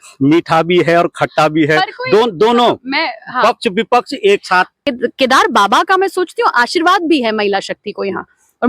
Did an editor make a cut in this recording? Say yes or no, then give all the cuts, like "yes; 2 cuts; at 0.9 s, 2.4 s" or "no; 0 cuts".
yes; 1 cut; at 4.8 s